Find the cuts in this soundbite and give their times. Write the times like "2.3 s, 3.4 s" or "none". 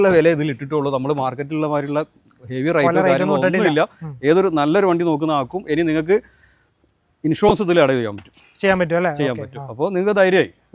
none